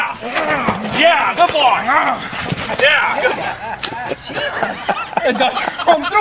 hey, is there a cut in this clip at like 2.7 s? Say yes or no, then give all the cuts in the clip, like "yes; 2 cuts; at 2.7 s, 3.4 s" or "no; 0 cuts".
no; 0 cuts